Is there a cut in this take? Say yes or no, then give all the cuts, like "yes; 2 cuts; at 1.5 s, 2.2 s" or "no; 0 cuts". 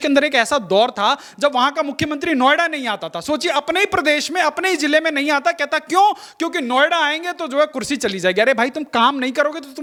no; 0 cuts